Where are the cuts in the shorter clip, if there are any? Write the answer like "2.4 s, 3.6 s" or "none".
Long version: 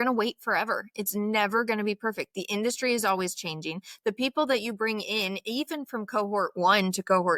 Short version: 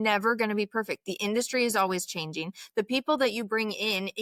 none